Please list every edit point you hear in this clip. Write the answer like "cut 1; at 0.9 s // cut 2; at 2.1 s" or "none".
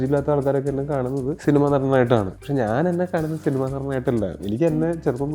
cut 1; at 1.3 s // cut 2; at 2.4 s

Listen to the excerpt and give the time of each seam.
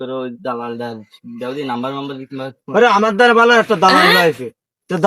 none

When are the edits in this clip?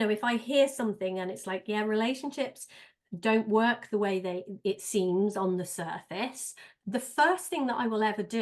cut 1; at 6.7 s

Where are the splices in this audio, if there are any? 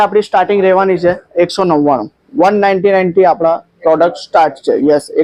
none

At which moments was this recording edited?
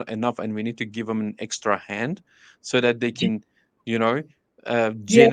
none

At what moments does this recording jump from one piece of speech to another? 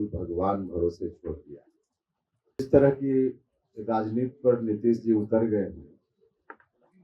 cut 1; at 2.6 s

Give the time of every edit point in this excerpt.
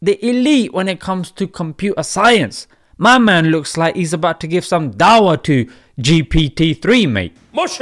none

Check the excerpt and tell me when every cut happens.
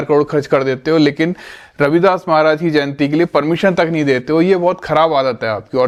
none

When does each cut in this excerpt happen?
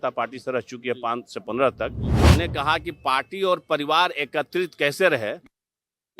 cut 1; at 2.1 s

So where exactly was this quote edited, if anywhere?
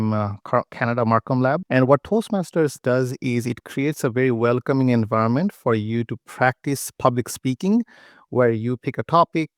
cut 1; at 1.6 s

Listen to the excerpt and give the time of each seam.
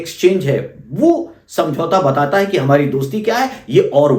none

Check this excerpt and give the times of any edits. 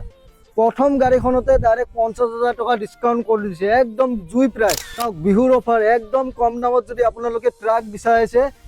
cut 1; at 4.9 s

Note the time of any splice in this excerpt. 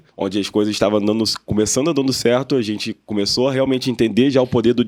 none

